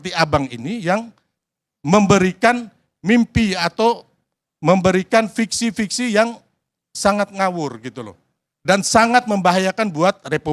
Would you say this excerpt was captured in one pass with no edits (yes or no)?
yes